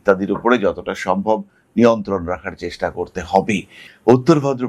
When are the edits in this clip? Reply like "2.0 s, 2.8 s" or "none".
3.8 s

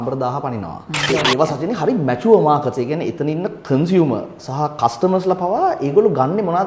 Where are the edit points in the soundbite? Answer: 1.1 s

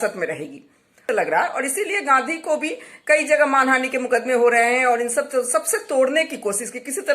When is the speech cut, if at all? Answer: 1.0 s

